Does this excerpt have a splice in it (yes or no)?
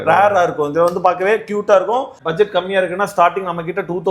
yes